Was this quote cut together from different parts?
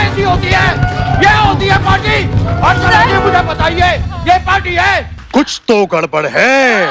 yes; 1 cut; at 5.2 s

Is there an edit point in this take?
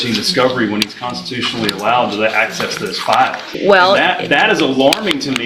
yes; 1 cut; at 3.5 s

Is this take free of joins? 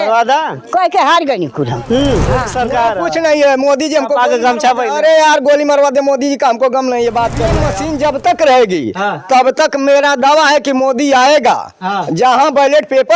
no; 2 cuts; at 2.5 s, 7.6 s

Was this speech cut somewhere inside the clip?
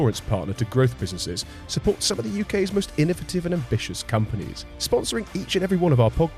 no; 0 cuts

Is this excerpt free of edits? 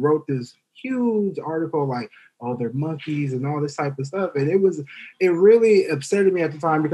yes; 0 cuts

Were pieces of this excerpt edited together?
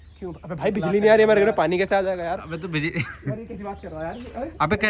no; 0 cuts

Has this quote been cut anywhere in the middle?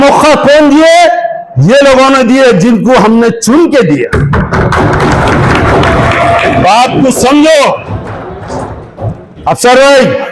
no; 0 cuts

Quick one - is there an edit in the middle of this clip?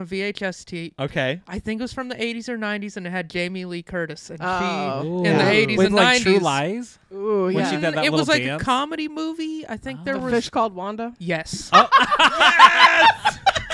no; 0 cuts

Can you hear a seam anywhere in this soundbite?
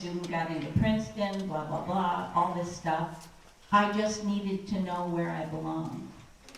no; 0 cuts

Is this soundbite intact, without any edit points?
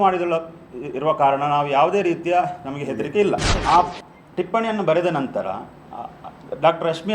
no; 1 cut; at 3.5 s

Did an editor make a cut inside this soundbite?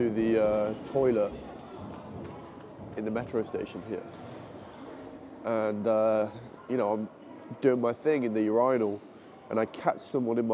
no; 0 cuts

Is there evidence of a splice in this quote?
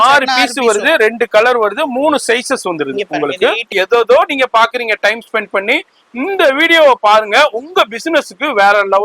yes; 1 cut; at 3.7 s

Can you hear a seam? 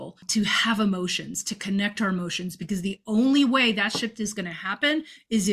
no; 0 cuts

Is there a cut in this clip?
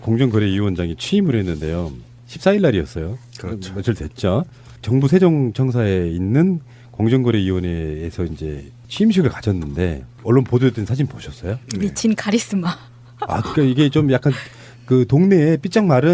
yes; 1 cut; at 8.9 s

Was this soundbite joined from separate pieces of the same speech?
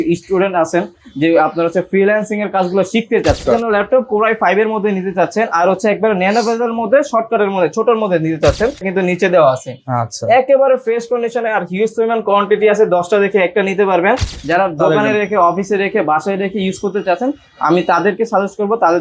yes; 3 cuts; at 3.4 s, 8.9 s, 14.4 s

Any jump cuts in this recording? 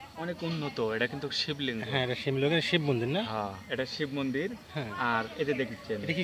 no; 0 cuts

